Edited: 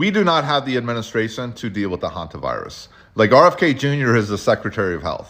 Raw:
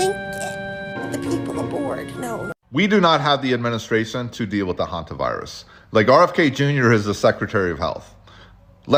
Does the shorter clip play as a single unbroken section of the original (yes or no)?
yes